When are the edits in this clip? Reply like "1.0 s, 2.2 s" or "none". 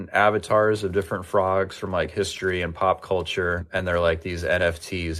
3.6 s